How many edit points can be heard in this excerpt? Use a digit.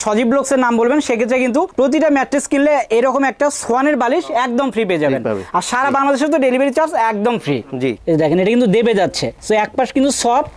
1